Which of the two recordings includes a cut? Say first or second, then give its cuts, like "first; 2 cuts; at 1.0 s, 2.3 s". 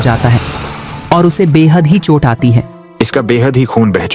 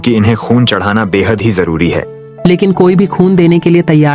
first; 1 cut; at 2.8 s